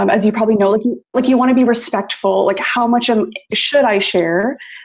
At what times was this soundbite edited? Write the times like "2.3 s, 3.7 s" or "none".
1.1 s

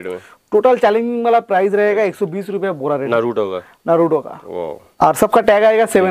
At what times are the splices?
3.1 s, 4.8 s

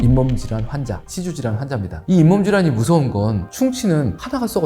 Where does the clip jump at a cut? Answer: 1.9 s, 3.4 s

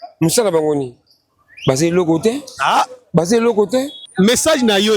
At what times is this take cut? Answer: 4.0 s

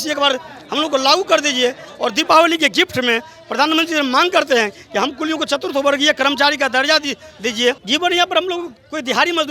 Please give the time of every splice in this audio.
7.8 s

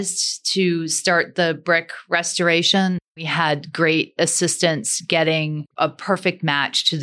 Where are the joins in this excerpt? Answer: 3.1 s

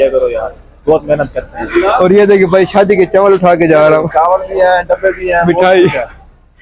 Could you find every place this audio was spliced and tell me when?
none

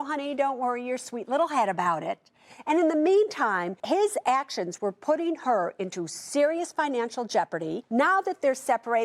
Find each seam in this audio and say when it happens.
3.7 s, 7.8 s

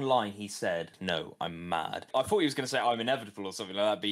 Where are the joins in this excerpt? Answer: 0.9 s, 2.1 s

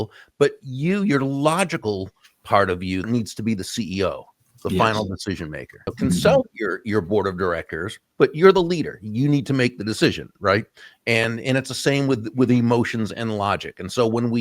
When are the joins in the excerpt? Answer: 3.0 s, 5.9 s

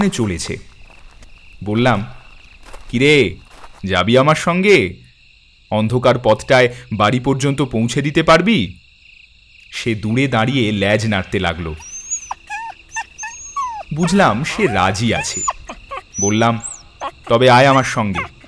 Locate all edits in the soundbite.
none

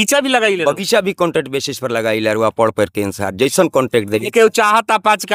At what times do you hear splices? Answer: none

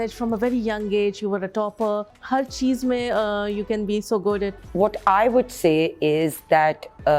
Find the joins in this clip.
2.2 s, 4.5 s

